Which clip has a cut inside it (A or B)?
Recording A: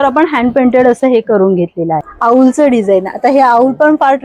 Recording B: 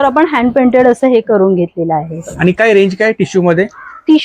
A